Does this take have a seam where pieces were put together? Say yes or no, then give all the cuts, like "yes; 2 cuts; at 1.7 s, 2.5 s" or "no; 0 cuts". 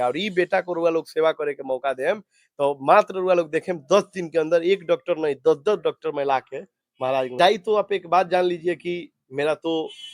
yes; 1 cut; at 7.3 s